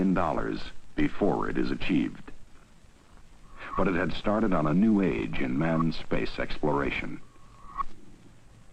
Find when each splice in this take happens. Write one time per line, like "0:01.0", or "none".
none